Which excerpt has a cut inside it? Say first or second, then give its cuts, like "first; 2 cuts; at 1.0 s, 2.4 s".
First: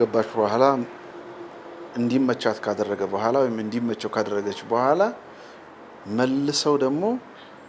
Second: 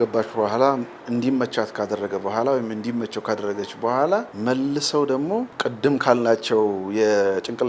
second; 3 cuts; at 0.9 s, 4.3 s, 5.5 s